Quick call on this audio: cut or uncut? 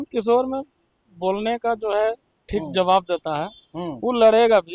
uncut